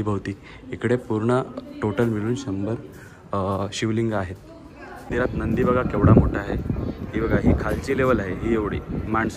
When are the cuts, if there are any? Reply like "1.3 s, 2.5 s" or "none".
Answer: 5.0 s